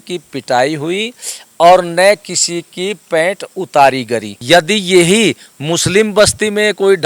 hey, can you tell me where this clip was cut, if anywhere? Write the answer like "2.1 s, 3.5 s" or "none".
4.3 s